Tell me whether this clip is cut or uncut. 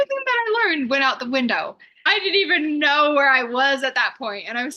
cut